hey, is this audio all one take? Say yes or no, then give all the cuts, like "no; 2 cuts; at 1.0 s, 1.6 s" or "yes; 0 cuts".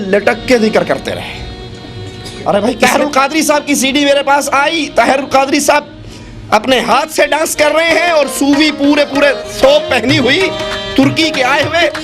no; 1 cut; at 2.8 s